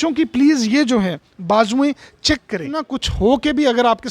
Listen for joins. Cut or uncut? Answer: cut